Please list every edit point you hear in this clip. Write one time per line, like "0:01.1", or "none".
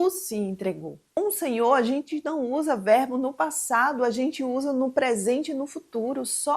0:01.0